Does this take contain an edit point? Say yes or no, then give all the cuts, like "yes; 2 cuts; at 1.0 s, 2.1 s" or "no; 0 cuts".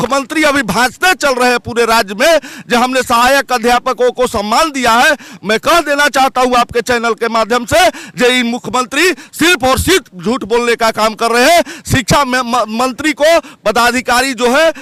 no; 0 cuts